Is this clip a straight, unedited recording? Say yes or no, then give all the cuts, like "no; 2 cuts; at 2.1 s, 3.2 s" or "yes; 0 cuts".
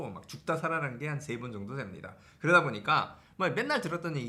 yes; 0 cuts